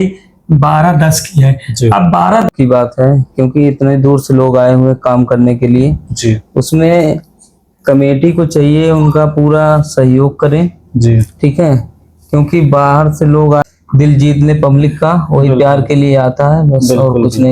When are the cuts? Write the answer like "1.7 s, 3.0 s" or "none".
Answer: 2.5 s, 13.6 s